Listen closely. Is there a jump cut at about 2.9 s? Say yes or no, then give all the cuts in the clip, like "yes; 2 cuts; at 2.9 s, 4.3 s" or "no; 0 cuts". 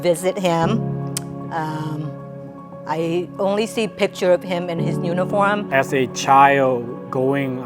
no; 1 cut; at 5.6 s